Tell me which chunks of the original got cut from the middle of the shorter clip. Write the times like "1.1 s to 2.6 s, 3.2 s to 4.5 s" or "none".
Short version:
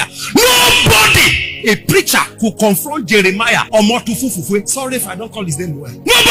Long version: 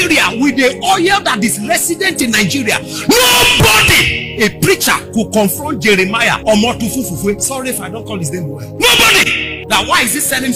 none